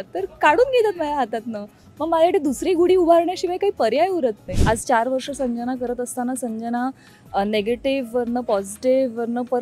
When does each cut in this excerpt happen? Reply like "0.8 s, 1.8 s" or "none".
4.5 s